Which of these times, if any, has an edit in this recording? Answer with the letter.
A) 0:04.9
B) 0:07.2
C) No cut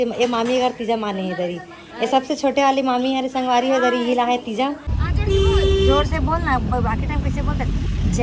A